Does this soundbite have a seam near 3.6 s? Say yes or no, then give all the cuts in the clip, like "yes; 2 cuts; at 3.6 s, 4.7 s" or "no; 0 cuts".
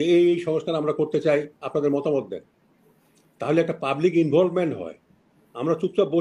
no; 0 cuts